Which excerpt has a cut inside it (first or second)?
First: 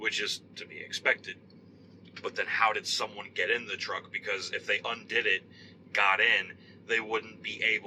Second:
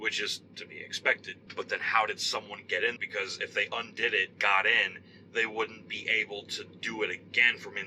second